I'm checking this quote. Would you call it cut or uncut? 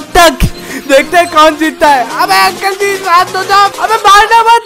cut